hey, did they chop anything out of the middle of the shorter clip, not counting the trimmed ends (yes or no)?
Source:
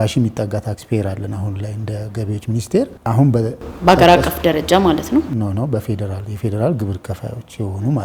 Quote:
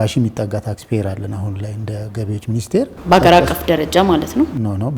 yes